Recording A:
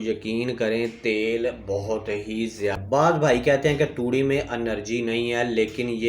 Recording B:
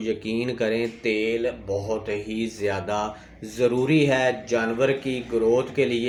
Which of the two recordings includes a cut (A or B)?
A